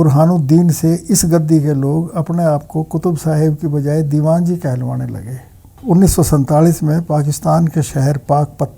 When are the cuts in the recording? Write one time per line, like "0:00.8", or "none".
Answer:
0:05.8

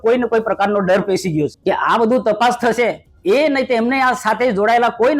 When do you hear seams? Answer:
0:01.6
0:03.1

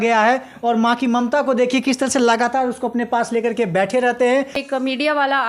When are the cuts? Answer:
0:04.6

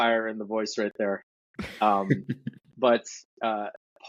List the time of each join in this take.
none

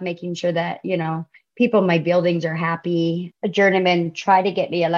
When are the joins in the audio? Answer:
0:03.3

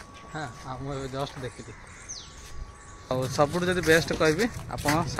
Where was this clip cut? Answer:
0:03.1

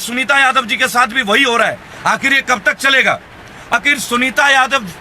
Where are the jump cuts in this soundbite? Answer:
0:03.7

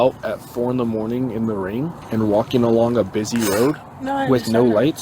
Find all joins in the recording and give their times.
0:02.0

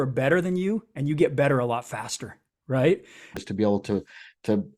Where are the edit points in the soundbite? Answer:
0:03.4

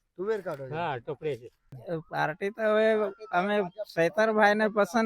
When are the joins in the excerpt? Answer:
0:01.7

